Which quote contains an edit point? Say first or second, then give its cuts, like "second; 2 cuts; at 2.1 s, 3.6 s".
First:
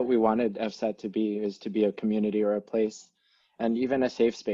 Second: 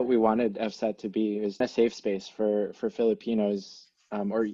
second; 1 cut; at 1.6 s